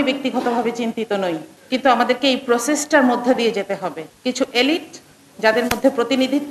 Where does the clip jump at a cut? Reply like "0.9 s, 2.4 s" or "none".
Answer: 1.5 s, 4.1 s